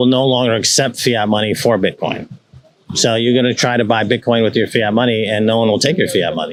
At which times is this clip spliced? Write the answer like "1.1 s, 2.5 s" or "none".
none